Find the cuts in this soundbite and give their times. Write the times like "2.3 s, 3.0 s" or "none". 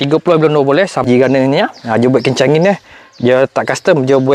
1.1 s